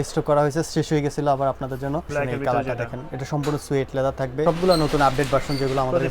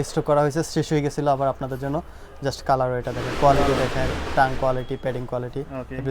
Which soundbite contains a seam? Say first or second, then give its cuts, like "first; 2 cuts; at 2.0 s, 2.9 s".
first; 2 cuts; at 2.1 s, 4.4 s